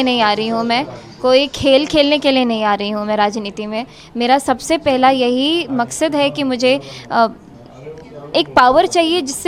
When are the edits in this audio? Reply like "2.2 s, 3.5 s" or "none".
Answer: none

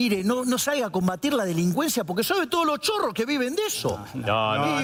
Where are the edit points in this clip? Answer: none

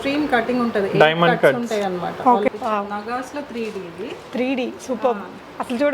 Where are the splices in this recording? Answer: 2.5 s

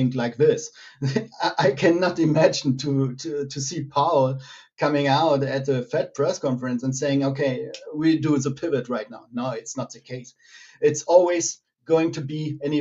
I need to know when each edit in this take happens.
none

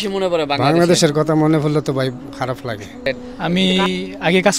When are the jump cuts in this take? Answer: 3.1 s

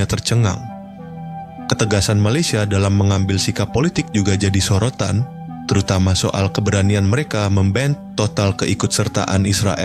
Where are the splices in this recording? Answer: none

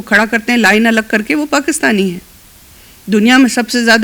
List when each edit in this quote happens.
none

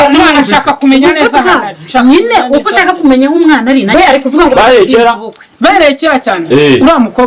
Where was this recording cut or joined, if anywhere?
3.9 s

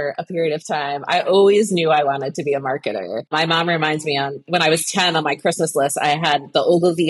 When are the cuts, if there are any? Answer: 3.3 s, 4.5 s

